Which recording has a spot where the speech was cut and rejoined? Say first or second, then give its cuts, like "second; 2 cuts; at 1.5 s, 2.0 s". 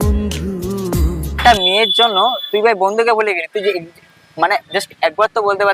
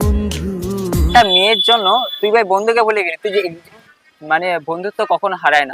second; 2 cuts; at 1.1 s, 3.9 s